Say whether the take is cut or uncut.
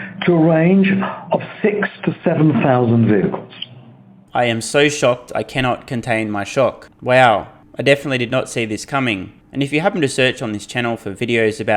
uncut